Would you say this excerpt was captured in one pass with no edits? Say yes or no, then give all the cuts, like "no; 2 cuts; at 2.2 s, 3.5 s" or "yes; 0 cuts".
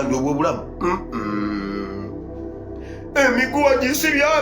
no; 2 cuts; at 2.0 s, 3.1 s